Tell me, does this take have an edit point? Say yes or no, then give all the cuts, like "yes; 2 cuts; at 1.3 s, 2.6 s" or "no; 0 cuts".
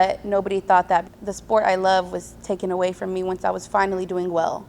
yes; 1 cut; at 1.1 s